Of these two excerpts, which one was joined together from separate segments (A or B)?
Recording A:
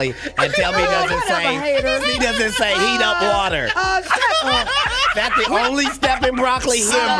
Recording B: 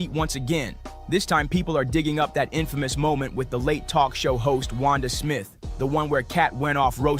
A